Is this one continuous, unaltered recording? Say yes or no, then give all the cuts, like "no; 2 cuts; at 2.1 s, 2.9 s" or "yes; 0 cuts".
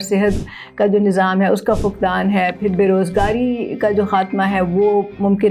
yes; 0 cuts